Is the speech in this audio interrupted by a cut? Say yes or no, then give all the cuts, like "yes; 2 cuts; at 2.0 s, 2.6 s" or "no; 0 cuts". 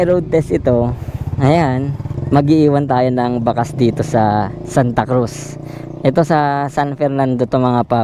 yes; 1 cut; at 2.1 s